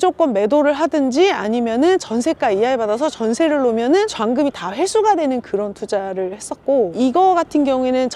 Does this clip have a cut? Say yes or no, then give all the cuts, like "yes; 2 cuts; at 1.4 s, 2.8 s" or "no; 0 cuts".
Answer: no; 0 cuts